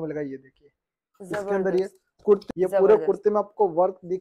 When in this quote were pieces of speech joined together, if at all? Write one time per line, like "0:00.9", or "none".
0:02.4

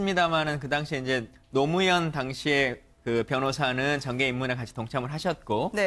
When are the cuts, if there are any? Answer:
0:03.6

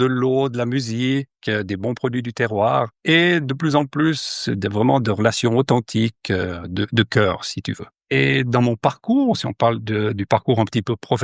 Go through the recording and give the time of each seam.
0:02.9

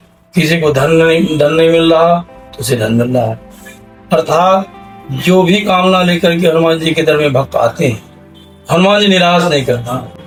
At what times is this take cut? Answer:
none

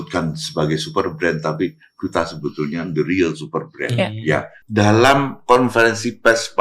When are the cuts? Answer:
0:04.6

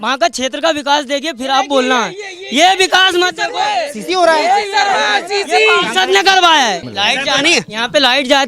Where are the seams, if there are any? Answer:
0:06.9

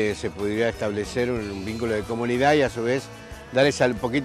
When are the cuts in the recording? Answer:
none

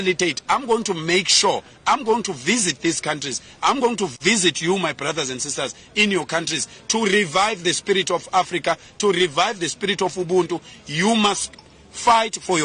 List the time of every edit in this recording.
none

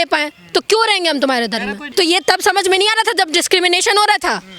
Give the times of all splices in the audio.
0:01.8

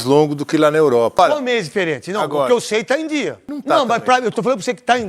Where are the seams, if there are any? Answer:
0:01.2
0:03.5

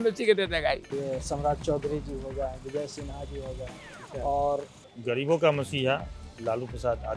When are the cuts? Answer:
0:00.9
0:04.8

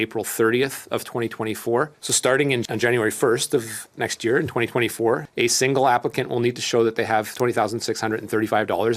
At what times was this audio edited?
0:02.0
0:05.3

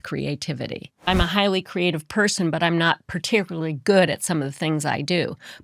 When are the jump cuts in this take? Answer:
0:01.1

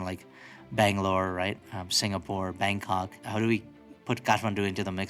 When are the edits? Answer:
0:03.2
0:03.9

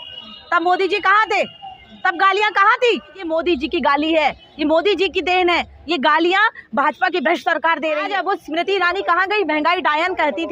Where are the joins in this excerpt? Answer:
0:03.3
0:08.1

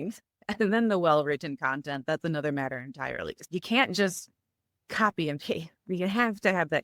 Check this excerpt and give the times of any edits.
0:03.3

